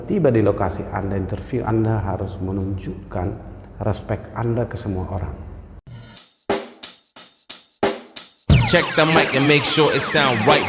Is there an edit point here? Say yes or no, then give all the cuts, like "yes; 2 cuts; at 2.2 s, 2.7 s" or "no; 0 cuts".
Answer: yes; 1 cut; at 5.8 s